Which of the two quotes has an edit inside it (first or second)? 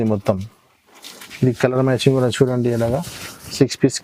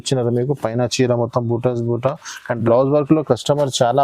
second